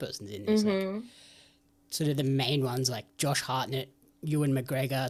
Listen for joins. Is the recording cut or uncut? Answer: uncut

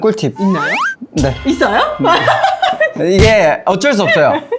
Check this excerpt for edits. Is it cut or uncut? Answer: uncut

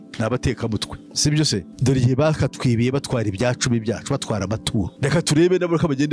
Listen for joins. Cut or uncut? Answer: uncut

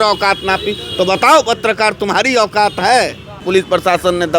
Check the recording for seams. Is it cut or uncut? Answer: cut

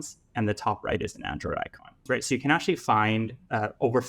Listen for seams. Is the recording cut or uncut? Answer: cut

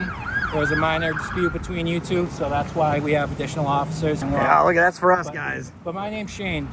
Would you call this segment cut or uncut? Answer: cut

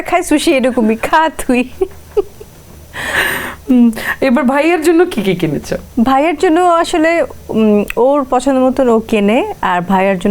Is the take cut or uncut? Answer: uncut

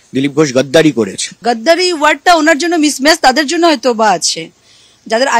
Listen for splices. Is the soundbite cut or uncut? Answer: cut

